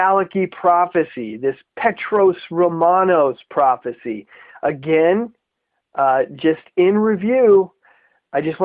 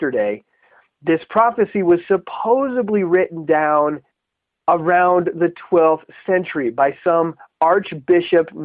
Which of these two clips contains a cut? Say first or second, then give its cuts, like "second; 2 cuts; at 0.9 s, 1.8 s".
second; 1 cut; at 1.3 s